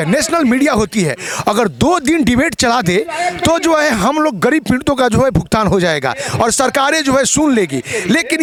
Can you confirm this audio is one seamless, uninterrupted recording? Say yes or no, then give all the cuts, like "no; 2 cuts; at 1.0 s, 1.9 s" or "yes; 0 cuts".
yes; 0 cuts